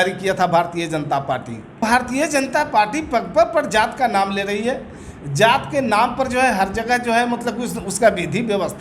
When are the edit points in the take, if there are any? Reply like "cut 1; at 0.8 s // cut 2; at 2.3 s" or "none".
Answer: cut 1; at 1.8 s

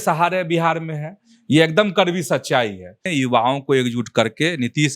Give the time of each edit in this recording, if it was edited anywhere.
cut 1; at 3.0 s

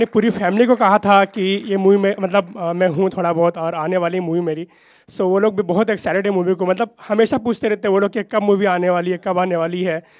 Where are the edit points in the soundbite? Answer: none

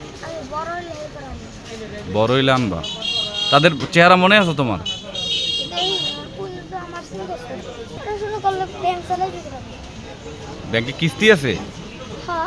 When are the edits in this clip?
cut 1; at 8.0 s

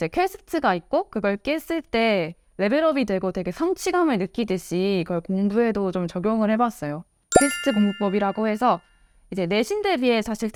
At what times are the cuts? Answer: none

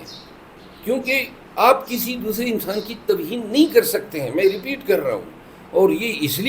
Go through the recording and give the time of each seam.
none

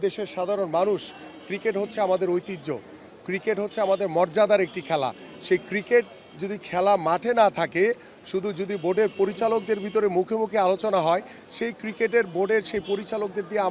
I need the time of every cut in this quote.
none

